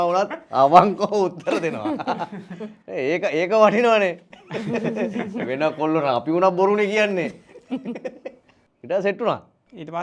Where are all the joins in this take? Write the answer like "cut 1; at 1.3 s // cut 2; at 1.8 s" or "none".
none

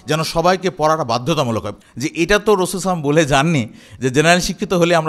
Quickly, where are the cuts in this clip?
cut 1; at 1.7 s

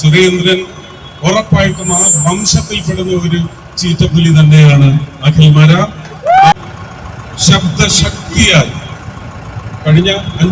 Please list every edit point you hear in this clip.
cut 1; at 6.5 s

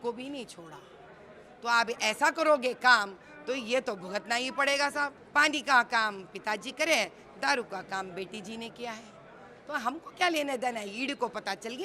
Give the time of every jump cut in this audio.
cut 1; at 5.2 s

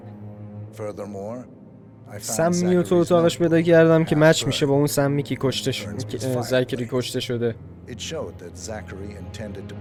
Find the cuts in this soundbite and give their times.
none

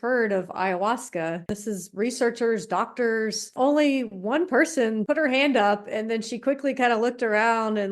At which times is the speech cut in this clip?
cut 1; at 1.5 s // cut 2; at 3.5 s // cut 3; at 5.0 s

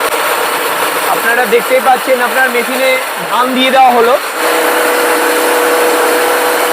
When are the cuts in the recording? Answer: cut 1; at 4.4 s

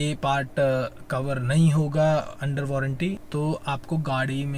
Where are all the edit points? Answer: cut 1; at 3.2 s

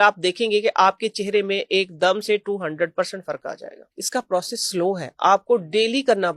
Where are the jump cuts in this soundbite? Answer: cut 1; at 3.8 s

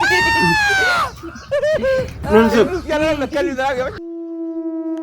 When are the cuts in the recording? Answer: cut 1; at 4.0 s

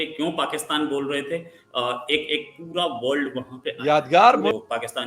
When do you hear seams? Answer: none

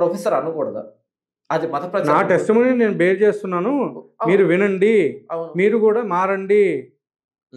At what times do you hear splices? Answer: none

